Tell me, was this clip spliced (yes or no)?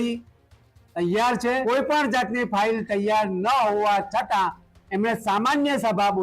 yes